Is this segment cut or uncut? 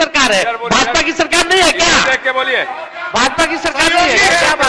uncut